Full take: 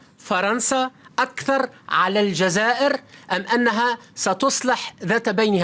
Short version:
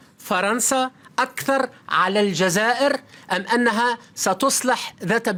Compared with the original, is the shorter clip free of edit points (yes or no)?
yes